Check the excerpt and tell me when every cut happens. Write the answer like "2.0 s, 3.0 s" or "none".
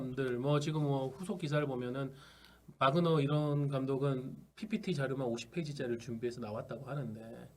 none